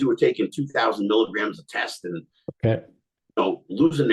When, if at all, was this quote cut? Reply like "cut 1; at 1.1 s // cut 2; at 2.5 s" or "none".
none